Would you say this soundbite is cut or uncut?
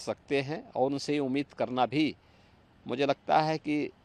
uncut